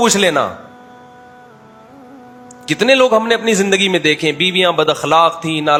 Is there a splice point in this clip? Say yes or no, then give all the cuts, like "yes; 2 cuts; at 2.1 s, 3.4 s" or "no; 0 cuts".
no; 0 cuts